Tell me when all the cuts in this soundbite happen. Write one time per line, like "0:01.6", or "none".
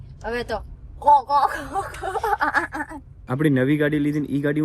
0:03.1